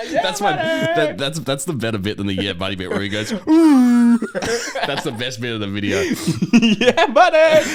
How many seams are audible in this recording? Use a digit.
0